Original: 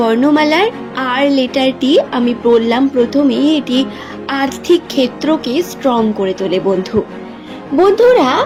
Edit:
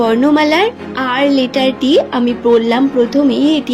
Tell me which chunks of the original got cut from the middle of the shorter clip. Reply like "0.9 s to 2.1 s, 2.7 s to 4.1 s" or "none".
none